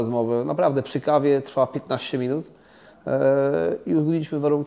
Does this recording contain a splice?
no; 0 cuts

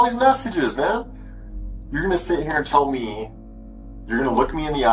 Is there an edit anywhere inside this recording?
no; 0 cuts

